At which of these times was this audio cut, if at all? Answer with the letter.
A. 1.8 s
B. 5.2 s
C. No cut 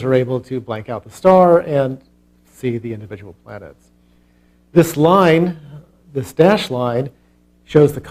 C